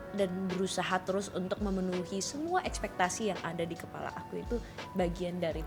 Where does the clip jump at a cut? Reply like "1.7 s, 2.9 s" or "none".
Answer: none